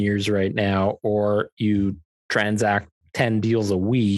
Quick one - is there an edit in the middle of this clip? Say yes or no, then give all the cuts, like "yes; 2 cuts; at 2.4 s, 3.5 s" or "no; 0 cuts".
yes; 1 cut; at 3.0 s